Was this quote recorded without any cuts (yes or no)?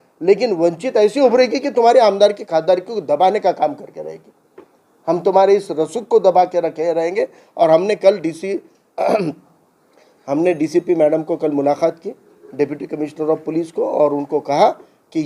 yes